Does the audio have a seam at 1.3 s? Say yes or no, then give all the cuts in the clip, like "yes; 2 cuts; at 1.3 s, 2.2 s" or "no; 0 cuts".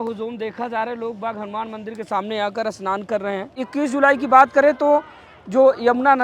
no; 1 cut; at 3.6 s